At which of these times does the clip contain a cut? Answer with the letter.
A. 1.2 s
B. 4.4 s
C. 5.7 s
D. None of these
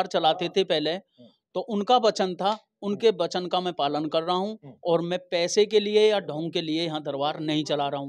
D